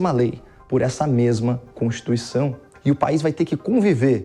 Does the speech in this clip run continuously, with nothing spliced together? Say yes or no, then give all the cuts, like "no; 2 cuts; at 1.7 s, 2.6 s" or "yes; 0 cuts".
no; 1 cut; at 2.7 s